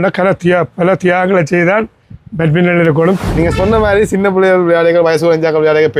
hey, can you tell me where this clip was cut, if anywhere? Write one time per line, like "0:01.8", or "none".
0:03.2